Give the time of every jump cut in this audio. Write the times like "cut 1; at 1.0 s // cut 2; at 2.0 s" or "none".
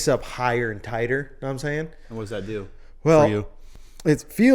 cut 1; at 2.1 s